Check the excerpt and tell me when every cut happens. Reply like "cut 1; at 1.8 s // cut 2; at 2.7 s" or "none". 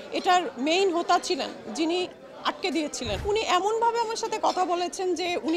cut 1; at 3.2 s